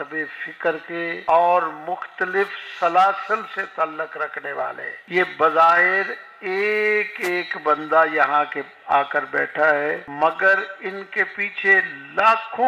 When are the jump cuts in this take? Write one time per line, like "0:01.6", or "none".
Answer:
0:01.2
0:04.9
0:10.1